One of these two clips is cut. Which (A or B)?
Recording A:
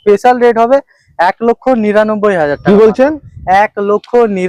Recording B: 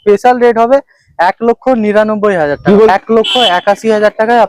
B